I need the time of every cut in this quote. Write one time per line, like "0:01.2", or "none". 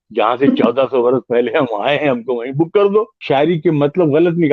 0:03.2